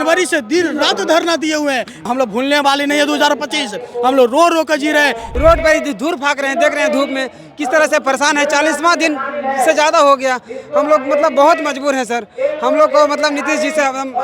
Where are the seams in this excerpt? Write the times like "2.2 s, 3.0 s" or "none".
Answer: 2.1 s, 5.2 s